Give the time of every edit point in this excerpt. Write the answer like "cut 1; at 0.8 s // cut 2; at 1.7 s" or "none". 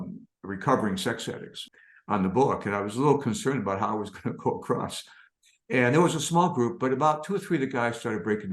cut 1; at 1.6 s